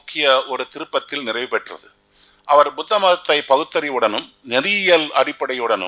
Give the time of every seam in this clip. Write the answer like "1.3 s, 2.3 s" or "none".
none